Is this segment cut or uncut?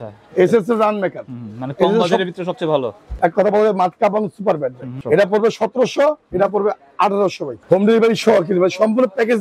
cut